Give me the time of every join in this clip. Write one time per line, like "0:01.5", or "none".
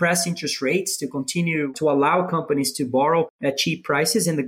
0:01.7
0:03.3